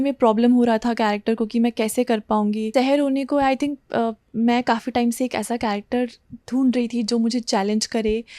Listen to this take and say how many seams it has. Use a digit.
1